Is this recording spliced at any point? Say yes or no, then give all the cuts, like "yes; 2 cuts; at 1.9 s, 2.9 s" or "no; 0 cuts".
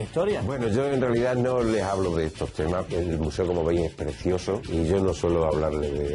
yes; 2 cuts; at 2.9 s, 4.7 s